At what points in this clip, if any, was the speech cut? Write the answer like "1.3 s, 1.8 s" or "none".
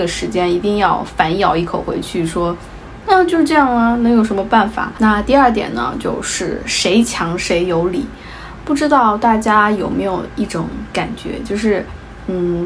4.8 s

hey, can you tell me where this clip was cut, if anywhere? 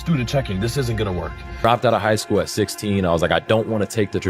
1.3 s

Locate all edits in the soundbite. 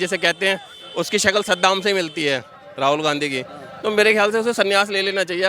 none

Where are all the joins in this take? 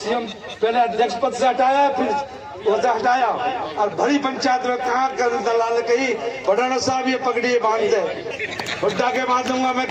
8.2 s

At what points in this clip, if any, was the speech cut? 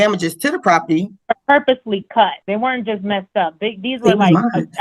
1.1 s, 2.4 s

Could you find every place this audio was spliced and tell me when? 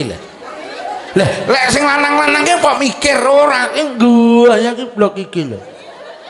none

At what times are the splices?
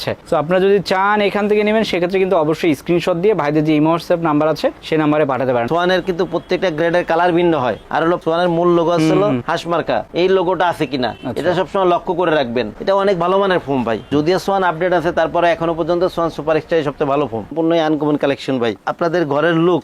5.7 s, 12.7 s, 17.5 s

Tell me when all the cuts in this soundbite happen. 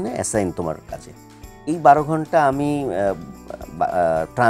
none

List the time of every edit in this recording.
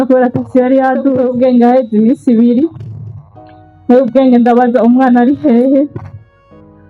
1.2 s

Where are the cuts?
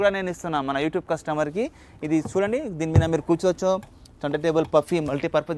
none

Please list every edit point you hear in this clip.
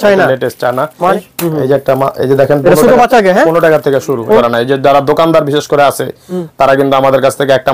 1.1 s, 4.4 s

